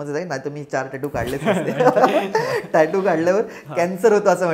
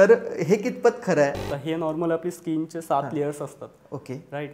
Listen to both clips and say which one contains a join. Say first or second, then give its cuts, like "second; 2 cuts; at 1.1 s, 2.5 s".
second; 1 cut; at 1.5 s